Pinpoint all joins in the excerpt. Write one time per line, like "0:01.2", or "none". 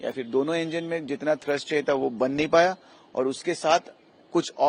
none